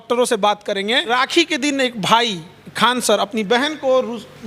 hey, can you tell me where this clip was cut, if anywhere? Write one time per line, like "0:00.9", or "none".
0:01.1